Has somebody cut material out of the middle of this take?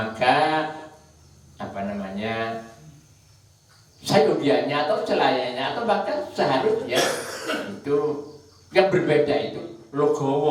no; 0 cuts

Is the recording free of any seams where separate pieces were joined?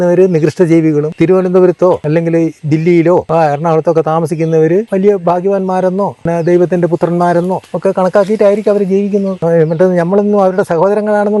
no; 7 cuts; at 1.1 s, 2.0 s, 3.3 s, 4.9 s, 6.2 s, 7.7 s, 9.3 s

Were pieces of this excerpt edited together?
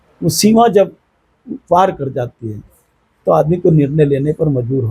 no; 0 cuts

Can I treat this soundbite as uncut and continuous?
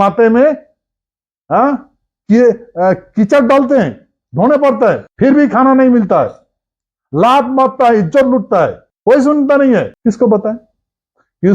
no; 3 cuts; at 5.1 s, 8.9 s, 9.9 s

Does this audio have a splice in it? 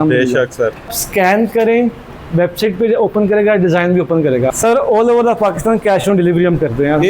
yes; 2 cuts; at 1.0 s, 4.5 s

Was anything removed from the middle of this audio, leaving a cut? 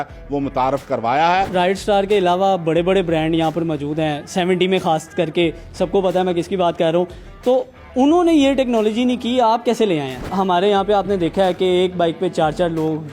yes; 2 cuts; at 1.5 s, 10.2 s

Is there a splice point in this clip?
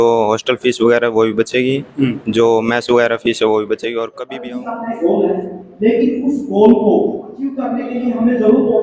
yes; 2 cuts; at 4.2 s, 7.6 s

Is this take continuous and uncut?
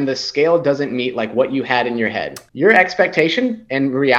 no; 1 cut; at 2.4 s

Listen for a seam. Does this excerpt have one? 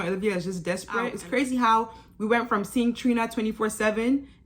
yes; 1 cut; at 1.1 s

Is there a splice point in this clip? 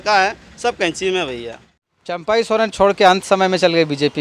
yes; 1 cut; at 2.2 s

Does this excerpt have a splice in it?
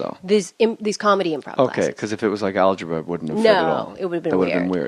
no; 0 cuts

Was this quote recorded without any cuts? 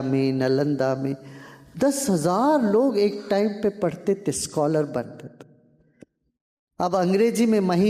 yes; 0 cuts

